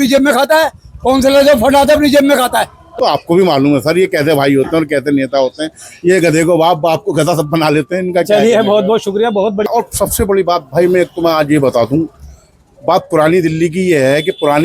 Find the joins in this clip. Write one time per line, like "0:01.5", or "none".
0:02.9
0:09.7